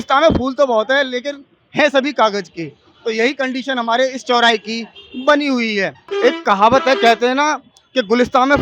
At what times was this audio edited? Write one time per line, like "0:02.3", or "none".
0:06.1